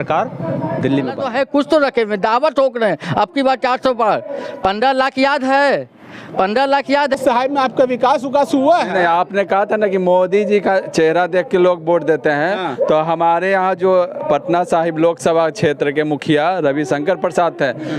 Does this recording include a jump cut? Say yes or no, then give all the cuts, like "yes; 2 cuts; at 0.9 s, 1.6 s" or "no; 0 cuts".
yes; 2 cuts; at 1.2 s, 7.2 s